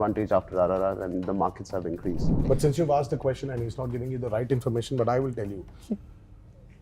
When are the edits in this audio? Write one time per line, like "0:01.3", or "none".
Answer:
0:02.3

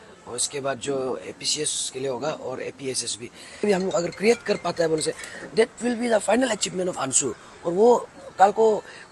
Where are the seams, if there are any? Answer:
0:03.6

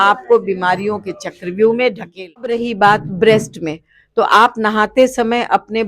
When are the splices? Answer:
0:02.6

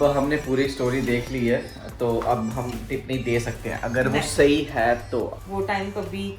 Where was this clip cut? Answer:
0:05.4

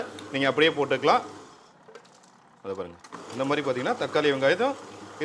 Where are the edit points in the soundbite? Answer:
none

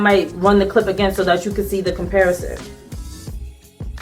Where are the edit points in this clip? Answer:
0:02.5

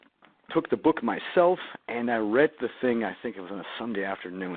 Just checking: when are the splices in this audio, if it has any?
0:03.1

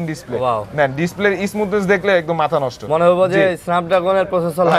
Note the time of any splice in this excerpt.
none

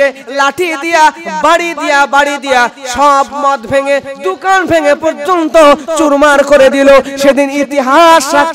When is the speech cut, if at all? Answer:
none

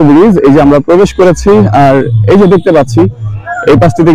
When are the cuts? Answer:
none

